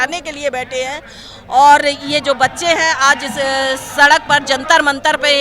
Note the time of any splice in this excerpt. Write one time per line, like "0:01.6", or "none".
none